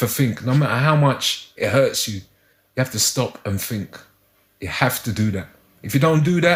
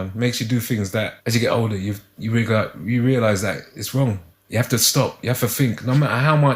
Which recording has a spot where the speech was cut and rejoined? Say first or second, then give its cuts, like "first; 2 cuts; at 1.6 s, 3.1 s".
second; 2 cuts; at 1.2 s, 4.3 s